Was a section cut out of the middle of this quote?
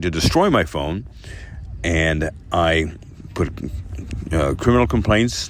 no; 0 cuts

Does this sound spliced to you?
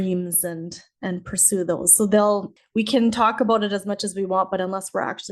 yes; 1 cut; at 2.6 s

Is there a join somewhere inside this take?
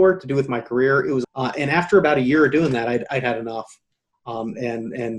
yes; 1 cut; at 1.3 s

